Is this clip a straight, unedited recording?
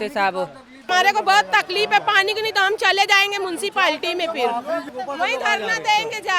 no; 2 cuts; at 0.9 s, 4.9 s

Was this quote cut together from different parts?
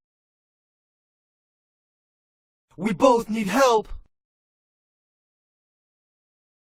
no; 0 cuts

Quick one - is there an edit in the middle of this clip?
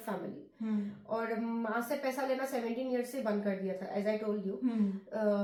no; 0 cuts

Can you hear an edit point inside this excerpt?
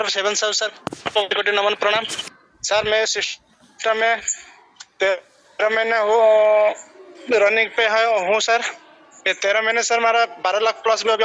no; 0 cuts

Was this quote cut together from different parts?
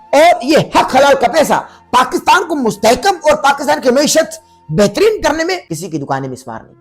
yes; 1 cut; at 5.7 s

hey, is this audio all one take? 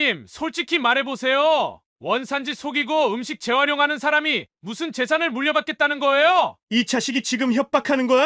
no; 1 cut; at 6.6 s

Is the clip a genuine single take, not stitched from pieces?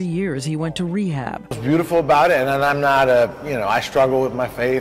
no; 1 cut; at 1.6 s

